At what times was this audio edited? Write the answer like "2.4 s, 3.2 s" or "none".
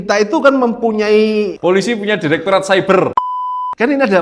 1.5 s, 3.2 s

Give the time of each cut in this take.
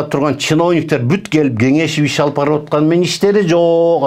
none

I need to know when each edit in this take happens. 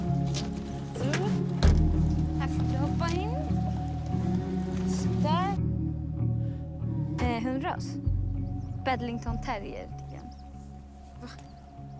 none

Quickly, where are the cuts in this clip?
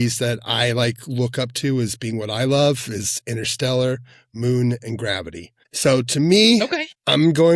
none

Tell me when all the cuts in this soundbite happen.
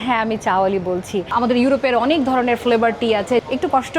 1.3 s

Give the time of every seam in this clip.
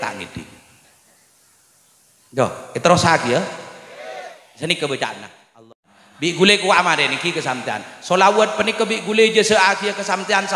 5.6 s

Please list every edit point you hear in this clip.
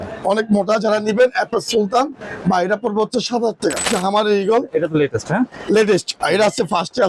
3.9 s

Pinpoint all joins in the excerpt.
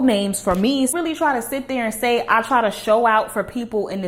0.9 s

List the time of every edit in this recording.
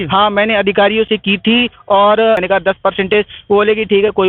2.4 s

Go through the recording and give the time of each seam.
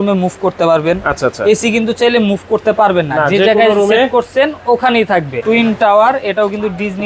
5.4 s

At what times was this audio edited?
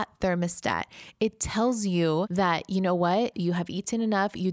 2.3 s

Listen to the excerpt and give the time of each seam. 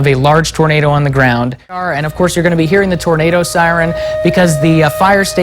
1.9 s

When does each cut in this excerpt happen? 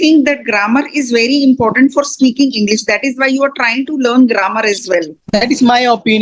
5.2 s

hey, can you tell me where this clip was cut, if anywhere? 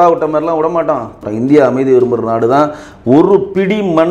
1.2 s

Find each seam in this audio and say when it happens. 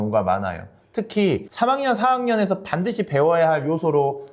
none

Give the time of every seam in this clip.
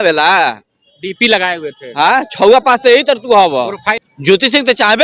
3.8 s

